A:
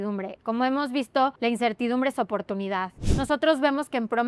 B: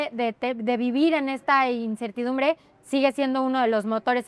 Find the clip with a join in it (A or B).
A